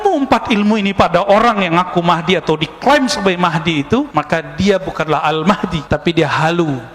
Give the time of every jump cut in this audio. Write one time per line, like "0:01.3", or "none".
none